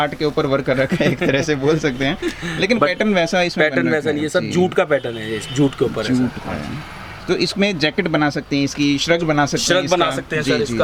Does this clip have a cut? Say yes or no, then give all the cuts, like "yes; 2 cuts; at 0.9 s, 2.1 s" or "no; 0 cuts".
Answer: no; 0 cuts